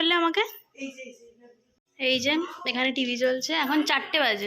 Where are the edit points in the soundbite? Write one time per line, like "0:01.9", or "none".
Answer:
0:01.9